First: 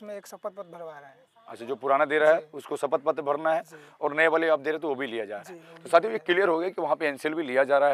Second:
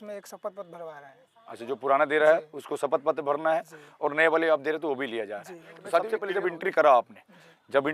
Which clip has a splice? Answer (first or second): second